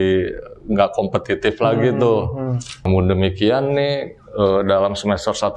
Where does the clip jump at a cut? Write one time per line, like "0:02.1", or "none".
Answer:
0:02.9